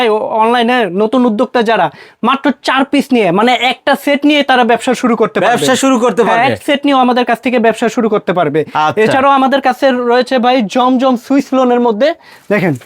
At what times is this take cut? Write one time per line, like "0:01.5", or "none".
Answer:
none